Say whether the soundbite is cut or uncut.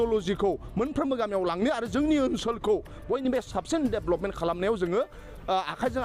uncut